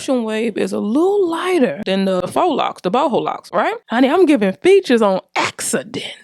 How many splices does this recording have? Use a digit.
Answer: 2